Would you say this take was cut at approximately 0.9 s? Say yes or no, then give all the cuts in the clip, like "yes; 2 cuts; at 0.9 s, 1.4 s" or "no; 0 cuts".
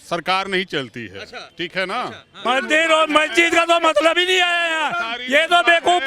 no; 1 cut; at 2.4 s